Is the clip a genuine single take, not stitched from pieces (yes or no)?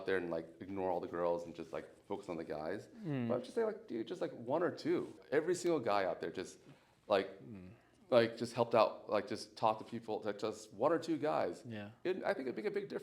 no